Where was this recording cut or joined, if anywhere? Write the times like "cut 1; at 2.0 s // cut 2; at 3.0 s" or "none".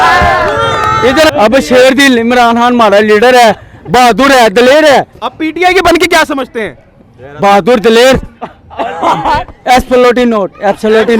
cut 1; at 1.3 s